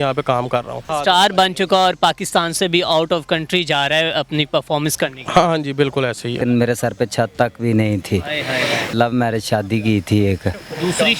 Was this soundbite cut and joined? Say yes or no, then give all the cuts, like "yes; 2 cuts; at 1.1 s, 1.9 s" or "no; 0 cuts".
yes; 3 cuts; at 0.9 s, 6.4 s, 8.9 s